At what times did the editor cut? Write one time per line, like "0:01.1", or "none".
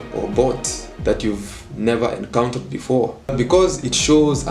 0:03.3